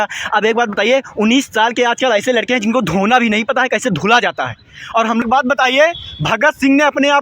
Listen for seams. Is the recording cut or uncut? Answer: cut